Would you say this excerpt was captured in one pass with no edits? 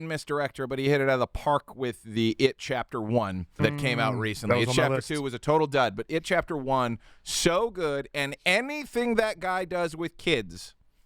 no; 1 cut; at 3.6 s

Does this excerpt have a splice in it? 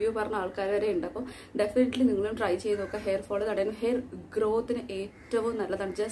no; 0 cuts

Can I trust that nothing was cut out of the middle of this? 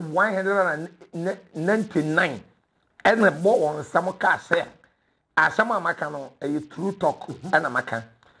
yes; 0 cuts

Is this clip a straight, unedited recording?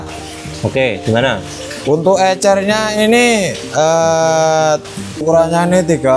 no; 1 cut; at 5.2 s

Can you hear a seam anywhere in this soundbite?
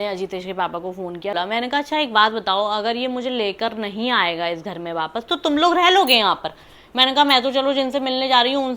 yes; 1 cut; at 1.3 s

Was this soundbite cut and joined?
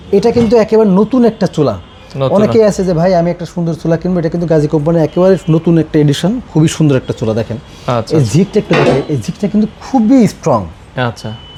no; 0 cuts

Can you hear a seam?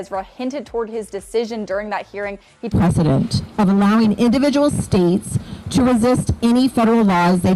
no; 0 cuts

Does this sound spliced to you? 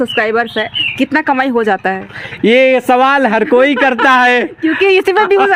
no; 0 cuts

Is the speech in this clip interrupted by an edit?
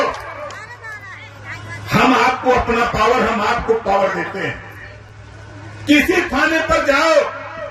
no; 0 cuts

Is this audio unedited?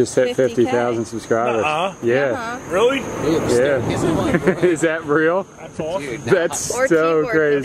yes; 0 cuts

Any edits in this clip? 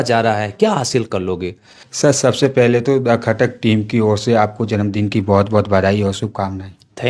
yes; 1 cut; at 2.0 s

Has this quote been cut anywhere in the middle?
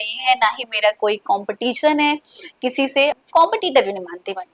yes; 1 cut; at 3.1 s

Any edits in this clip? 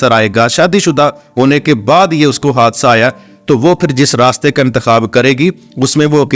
no; 0 cuts

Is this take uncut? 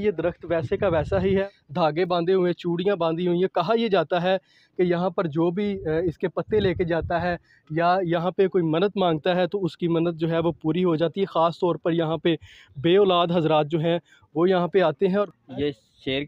no; 2 cuts; at 1.4 s, 15.3 s

